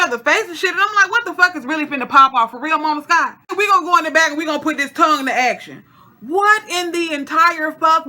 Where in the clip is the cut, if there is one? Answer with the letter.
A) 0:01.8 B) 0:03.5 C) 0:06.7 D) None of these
B